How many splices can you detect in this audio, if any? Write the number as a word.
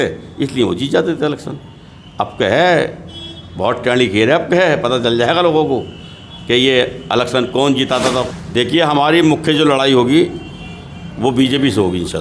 one